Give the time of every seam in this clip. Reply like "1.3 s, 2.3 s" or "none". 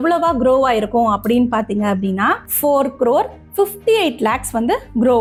none